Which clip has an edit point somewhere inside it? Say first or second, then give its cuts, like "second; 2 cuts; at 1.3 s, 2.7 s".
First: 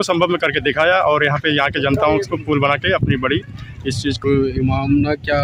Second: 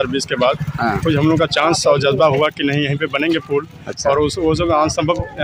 first; 1 cut; at 4.2 s